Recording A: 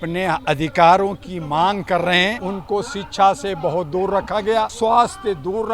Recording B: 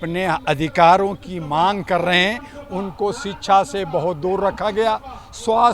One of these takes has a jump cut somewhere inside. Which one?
A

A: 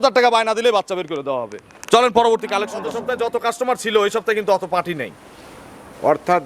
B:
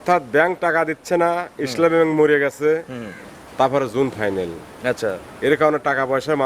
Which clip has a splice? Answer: A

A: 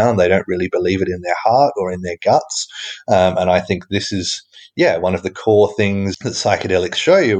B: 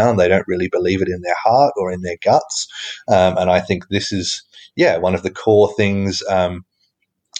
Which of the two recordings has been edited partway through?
A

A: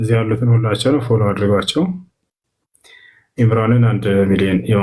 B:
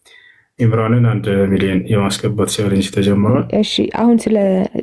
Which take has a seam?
B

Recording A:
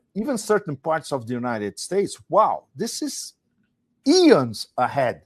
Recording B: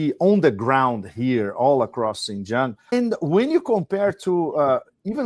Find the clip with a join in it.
B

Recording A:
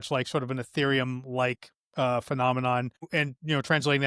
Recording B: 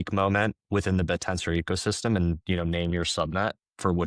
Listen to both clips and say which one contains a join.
A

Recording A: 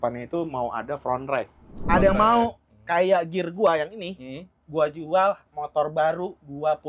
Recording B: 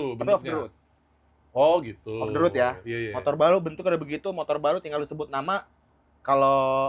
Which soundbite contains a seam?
A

